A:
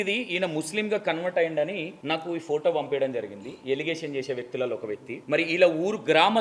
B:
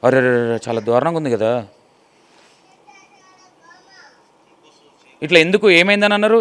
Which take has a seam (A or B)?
A